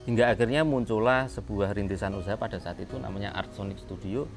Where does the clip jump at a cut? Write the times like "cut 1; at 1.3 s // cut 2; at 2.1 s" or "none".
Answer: none